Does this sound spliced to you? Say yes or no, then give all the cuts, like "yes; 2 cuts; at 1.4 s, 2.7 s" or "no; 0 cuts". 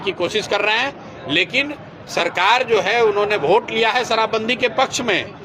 no; 0 cuts